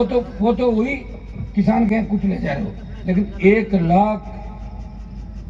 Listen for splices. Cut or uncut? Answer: uncut